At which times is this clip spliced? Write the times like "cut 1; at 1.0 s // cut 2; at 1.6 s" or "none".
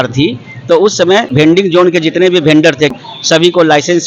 cut 1; at 1.4 s // cut 2; at 2.9 s